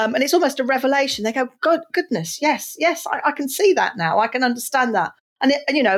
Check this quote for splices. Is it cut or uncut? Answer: uncut